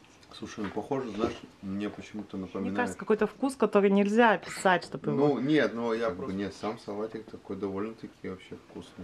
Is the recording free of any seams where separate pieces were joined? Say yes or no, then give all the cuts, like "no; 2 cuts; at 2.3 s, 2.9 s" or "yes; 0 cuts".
no; 2 cuts; at 2.9 s, 6.1 s